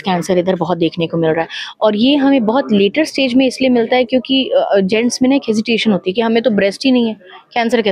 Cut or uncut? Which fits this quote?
uncut